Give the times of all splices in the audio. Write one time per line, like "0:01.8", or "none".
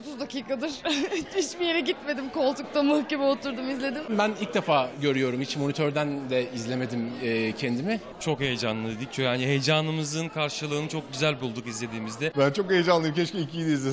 0:04.0
0:08.1
0:12.3